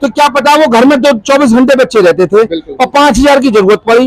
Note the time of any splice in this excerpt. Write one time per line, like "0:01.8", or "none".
none